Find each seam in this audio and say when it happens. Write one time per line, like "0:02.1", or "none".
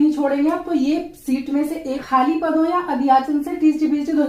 0:02.0